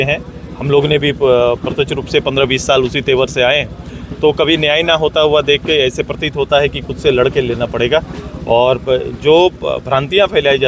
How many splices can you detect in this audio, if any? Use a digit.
0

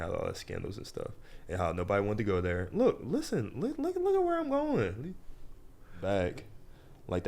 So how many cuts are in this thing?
1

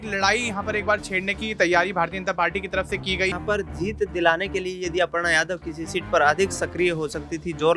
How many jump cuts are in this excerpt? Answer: 1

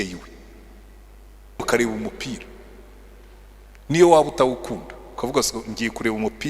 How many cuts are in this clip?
1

